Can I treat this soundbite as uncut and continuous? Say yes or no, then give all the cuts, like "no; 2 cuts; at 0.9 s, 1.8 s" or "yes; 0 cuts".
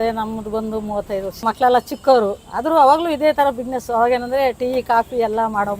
no; 1 cut; at 1.4 s